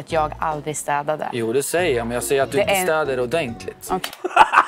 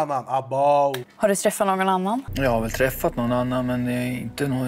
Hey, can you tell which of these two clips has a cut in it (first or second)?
second